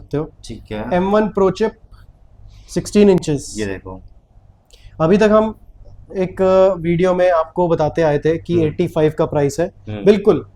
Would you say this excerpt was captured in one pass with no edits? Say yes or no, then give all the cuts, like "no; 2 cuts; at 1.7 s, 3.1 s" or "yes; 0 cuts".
yes; 0 cuts